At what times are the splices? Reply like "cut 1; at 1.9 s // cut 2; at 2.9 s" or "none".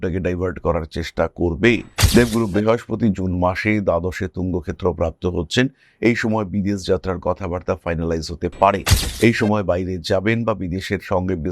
cut 1; at 1.9 s